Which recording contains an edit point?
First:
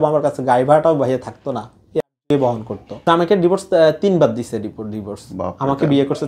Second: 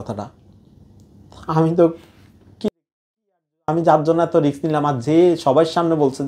first; 1 cut; at 3.0 s

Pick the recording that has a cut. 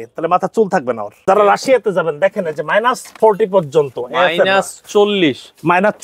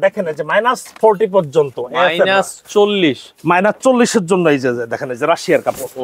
first; 1 cut; at 1.1 s

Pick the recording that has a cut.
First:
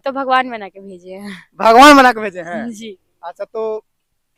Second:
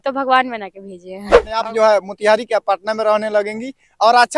second; 1 cut; at 1.5 s

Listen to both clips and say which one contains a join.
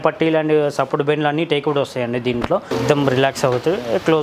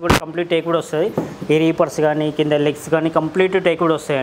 first; 1 cut; at 2.7 s

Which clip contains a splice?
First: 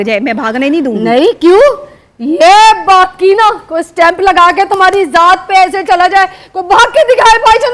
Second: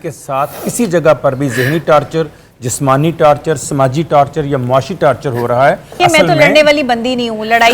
second; 1 cut; at 5.9 s

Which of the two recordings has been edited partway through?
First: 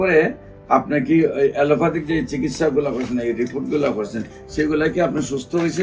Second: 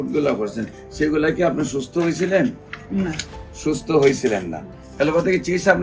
second; 1 cut; at 4.8 s

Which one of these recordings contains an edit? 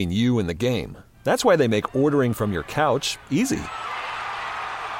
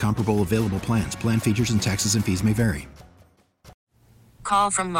second; 1 cut; at 3.8 s

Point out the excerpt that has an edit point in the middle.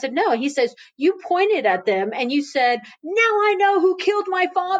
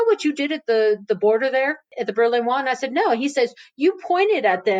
second; 1 cut; at 1.9 s

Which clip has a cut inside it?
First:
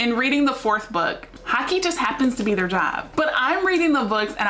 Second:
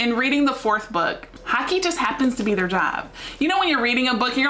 first; 1 cut; at 3.1 s

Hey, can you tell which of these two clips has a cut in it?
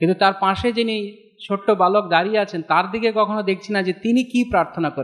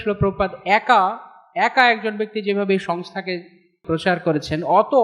second; 1 cut; at 3.8 s

